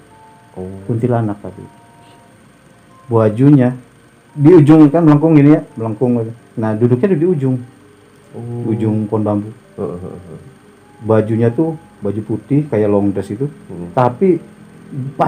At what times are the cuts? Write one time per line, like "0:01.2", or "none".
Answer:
none